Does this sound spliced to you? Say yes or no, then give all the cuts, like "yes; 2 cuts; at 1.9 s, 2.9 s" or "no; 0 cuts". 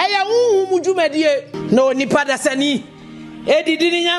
yes; 1 cut; at 1.5 s